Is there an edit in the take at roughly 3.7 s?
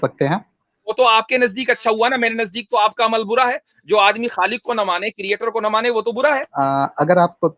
no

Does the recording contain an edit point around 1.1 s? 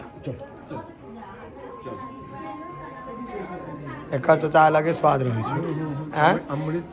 no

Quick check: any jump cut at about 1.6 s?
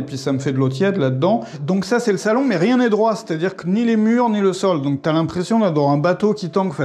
yes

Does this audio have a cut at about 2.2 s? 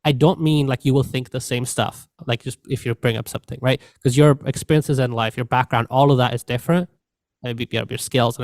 yes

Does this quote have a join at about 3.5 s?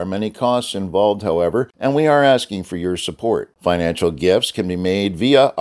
no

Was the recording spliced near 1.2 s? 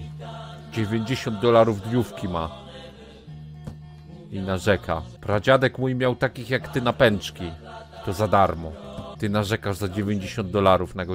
no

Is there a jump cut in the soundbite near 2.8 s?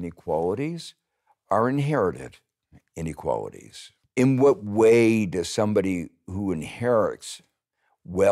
no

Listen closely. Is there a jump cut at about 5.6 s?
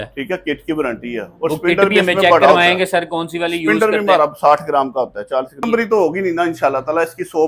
yes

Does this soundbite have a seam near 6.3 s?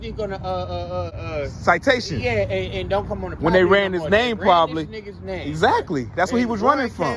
no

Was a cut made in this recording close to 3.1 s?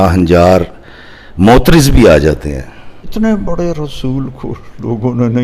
yes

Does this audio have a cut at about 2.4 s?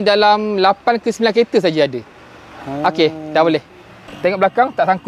no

